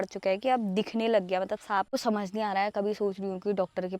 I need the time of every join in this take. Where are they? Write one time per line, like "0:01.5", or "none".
0:01.9